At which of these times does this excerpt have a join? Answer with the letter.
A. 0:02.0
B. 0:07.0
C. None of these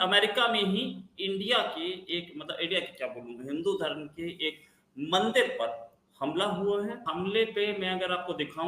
B